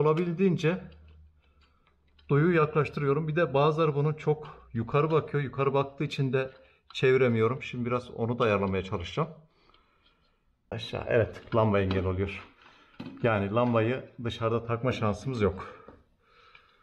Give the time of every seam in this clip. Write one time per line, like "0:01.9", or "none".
0:10.7

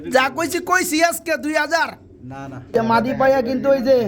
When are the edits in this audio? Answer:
0:02.6

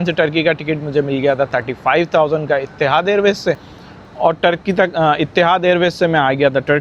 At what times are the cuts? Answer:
none

